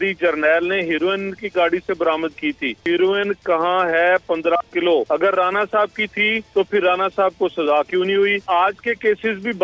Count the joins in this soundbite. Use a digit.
4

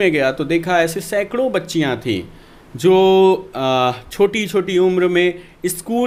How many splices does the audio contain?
0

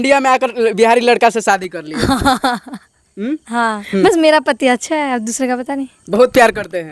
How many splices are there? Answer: 1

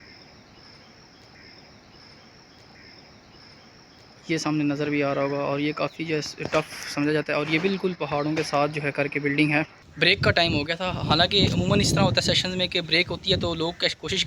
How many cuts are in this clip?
1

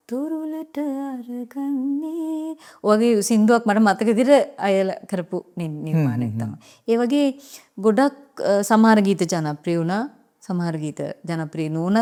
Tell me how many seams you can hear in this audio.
0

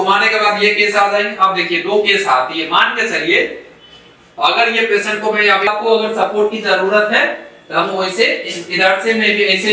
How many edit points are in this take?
1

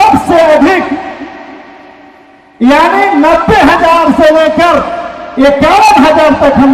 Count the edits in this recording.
0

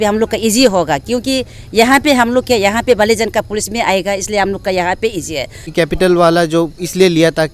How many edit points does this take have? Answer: 1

